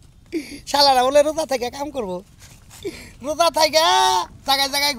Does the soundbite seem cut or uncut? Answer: uncut